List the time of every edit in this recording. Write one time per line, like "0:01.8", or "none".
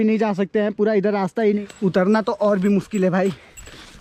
0:01.6